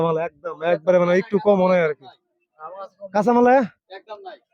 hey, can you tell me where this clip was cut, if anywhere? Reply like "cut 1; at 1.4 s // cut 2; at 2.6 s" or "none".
none